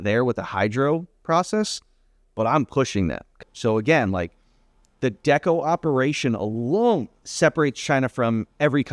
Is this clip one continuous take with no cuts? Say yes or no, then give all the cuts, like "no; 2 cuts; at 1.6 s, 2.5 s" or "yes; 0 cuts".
no; 2 cuts; at 3.4 s, 7.2 s